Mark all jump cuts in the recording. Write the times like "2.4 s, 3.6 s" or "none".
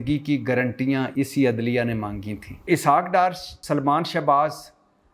1.1 s, 2.6 s, 3.5 s